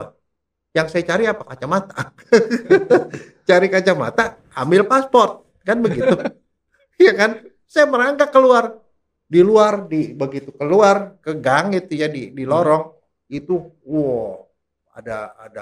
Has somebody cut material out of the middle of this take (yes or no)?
no